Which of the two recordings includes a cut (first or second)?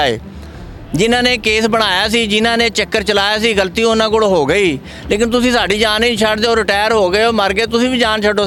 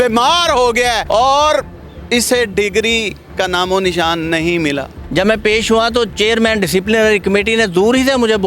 second